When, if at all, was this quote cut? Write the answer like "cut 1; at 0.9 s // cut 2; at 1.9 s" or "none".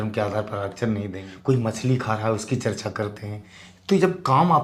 cut 1; at 1.2 s